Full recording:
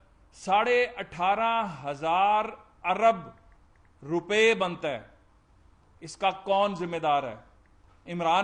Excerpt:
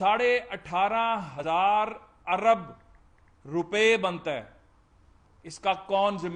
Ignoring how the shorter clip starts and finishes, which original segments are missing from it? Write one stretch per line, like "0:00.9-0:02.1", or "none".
0:01.8-0:01.9